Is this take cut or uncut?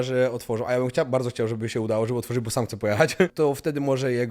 cut